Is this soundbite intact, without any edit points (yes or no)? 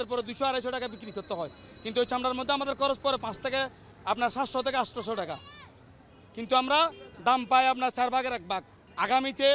yes